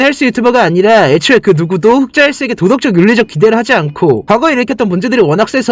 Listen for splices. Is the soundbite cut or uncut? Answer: uncut